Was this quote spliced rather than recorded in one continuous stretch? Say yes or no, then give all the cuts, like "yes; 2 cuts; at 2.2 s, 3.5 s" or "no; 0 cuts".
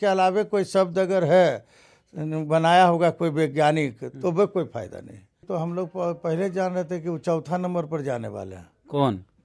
yes; 1 cut; at 5.4 s